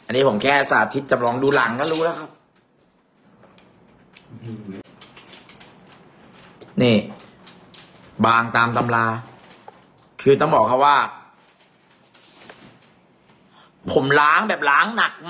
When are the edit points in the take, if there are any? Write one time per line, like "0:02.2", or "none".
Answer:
0:04.8